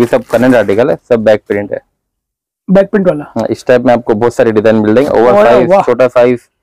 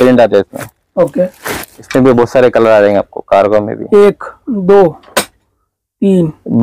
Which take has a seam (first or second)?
second